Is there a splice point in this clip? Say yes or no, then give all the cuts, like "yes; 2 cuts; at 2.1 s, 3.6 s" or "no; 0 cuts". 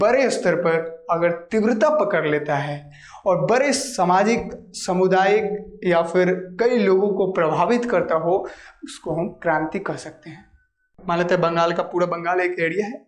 yes; 1 cut; at 10.9 s